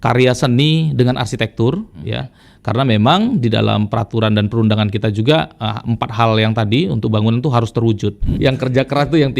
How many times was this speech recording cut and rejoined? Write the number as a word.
one